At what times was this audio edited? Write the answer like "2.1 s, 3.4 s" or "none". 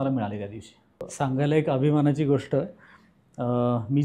1.0 s

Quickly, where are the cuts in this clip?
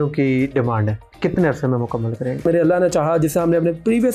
1.0 s, 2.4 s

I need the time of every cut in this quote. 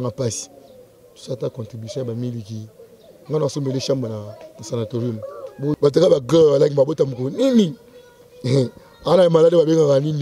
5.7 s

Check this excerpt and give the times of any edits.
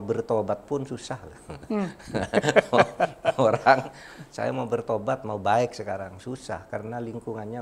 none

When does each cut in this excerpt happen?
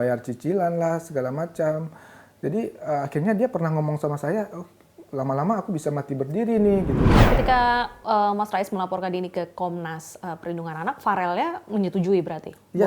7.2 s

